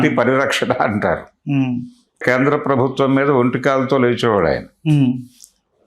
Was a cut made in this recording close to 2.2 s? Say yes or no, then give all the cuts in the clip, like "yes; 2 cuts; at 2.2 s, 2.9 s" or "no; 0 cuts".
yes; 1 cut; at 2.2 s